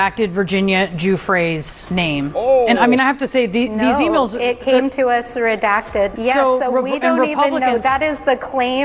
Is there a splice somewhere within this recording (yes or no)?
no